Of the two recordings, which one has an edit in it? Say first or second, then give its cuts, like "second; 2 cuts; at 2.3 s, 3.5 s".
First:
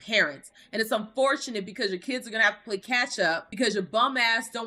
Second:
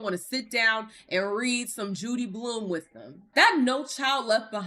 second; 1 cut; at 3.2 s